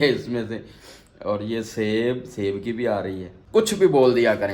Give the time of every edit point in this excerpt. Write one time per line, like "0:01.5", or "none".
0:03.3